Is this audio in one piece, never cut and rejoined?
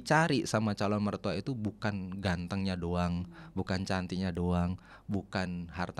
yes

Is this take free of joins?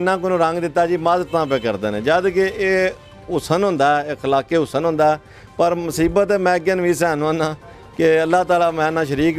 yes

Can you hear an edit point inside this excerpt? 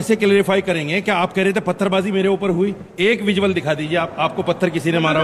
no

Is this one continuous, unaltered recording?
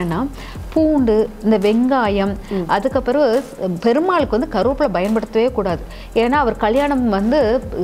yes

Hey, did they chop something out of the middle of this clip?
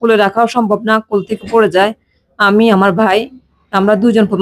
no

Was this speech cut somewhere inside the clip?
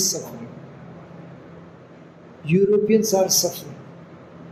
no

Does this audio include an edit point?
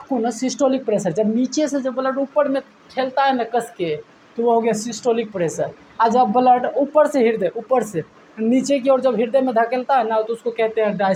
no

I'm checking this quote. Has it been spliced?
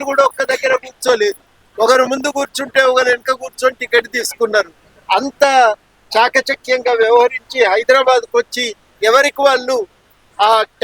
no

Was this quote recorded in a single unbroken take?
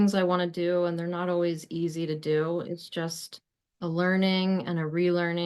yes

